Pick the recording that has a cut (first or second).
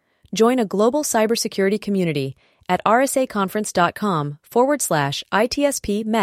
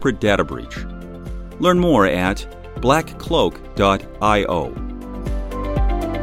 second